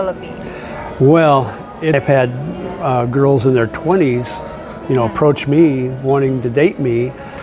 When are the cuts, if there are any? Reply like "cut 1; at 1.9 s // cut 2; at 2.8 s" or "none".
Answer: cut 1; at 1.9 s